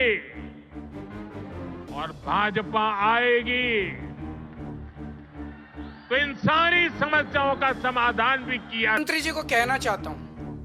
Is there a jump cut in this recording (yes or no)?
yes